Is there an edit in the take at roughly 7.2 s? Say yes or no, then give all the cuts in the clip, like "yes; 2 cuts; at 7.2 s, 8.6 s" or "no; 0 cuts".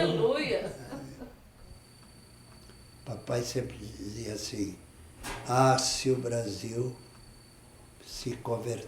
no; 1 cut; at 1.6 s